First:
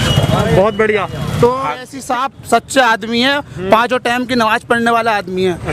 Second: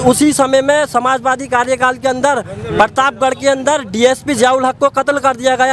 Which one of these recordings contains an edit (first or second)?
first